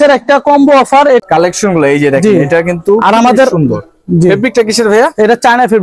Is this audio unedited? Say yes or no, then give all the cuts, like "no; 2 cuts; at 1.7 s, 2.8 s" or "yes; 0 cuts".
no; 1 cut; at 1.2 s